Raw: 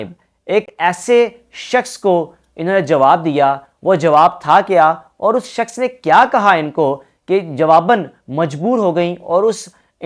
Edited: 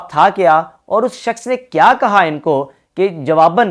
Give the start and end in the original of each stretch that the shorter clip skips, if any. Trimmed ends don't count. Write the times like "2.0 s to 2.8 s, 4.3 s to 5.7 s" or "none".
none